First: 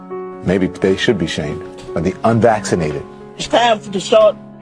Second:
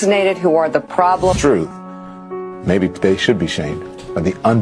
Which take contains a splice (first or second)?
first